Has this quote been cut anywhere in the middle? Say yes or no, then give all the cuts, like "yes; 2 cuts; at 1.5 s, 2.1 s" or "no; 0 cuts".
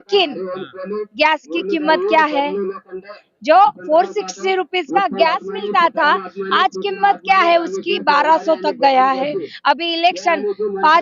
no; 0 cuts